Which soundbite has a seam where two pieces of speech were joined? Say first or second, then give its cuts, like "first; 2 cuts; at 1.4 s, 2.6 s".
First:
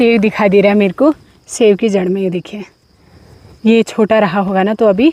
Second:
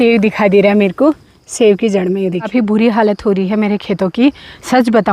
second; 1 cut; at 2.5 s